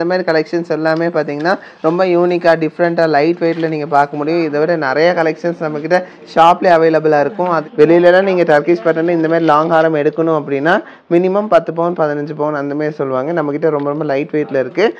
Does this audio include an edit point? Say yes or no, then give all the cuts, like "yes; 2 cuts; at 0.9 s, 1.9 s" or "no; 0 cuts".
yes; 1 cut; at 7.6 s